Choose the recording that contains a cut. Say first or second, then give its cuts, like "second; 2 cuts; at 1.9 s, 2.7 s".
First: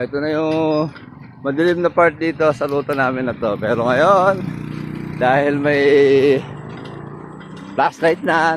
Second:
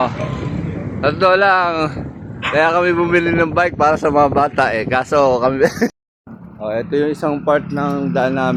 second; 1 cut; at 6.0 s